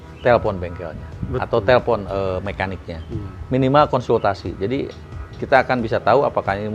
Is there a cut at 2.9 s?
no; 0 cuts

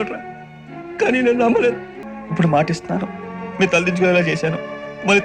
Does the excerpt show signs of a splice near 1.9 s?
yes; 1 cut; at 1.9 s

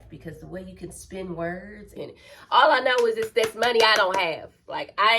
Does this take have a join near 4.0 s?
no; 1 cut; at 2.0 s

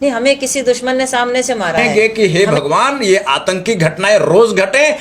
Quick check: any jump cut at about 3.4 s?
no; 1 cut; at 1.8 s

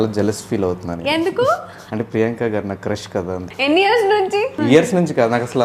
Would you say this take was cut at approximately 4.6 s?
yes; 3 cuts; at 1.8 s, 3.5 s, 4.6 s

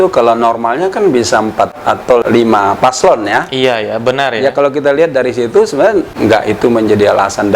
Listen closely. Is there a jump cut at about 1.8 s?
yes; 2 cuts; at 1.8 s, 6.1 s

